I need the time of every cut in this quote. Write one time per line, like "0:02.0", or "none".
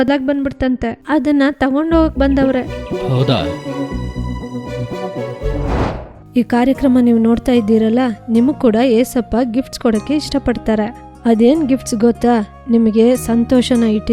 0:00.9
0:06.1